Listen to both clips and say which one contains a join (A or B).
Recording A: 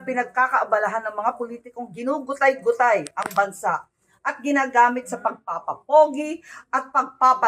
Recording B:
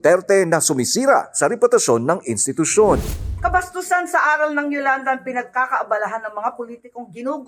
B